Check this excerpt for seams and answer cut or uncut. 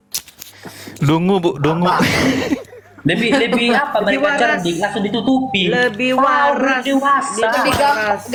uncut